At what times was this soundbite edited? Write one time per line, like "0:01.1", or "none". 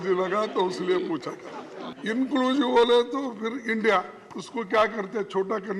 0:01.9